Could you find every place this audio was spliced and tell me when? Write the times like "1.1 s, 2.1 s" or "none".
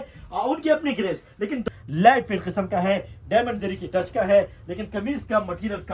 1.7 s